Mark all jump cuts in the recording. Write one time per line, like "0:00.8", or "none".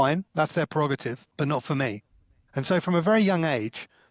0:01.2